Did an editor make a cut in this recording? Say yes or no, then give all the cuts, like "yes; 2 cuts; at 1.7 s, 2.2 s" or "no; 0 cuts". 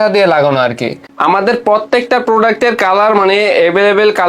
yes; 1 cut; at 1.1 s